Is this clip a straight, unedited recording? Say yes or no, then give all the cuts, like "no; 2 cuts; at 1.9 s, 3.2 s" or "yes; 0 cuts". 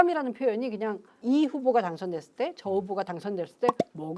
no; 1 cut; at 1.1 s